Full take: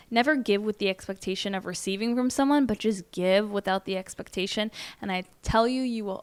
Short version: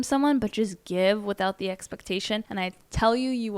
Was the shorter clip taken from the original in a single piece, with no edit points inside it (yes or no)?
no